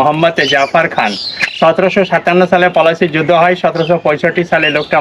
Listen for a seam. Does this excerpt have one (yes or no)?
no